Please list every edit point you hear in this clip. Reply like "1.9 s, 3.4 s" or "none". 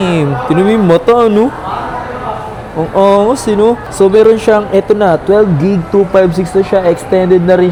none